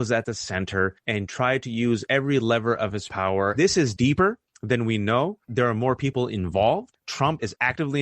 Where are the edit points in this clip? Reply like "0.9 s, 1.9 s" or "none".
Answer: 3.5 s, 6.9 s